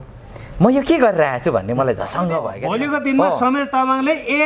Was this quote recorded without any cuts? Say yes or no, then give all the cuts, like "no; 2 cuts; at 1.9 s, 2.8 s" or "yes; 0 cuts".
no; 1 cut; at 2.6 s